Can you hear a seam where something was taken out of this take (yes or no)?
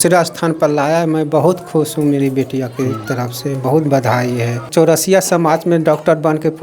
yes